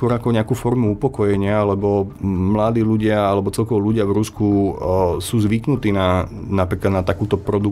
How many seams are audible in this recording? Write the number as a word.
one